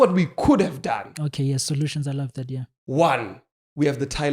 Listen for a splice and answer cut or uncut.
uncut